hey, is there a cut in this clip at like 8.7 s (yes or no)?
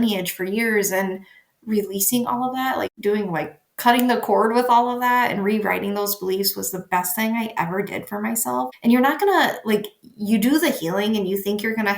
yes